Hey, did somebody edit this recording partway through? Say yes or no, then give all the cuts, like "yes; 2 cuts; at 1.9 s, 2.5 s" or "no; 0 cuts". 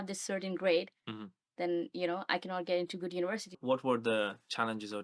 yes; 1 cut; at 3.6 s